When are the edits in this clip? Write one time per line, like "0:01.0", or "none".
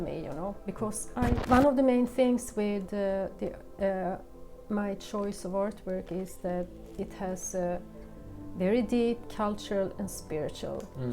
0:01.4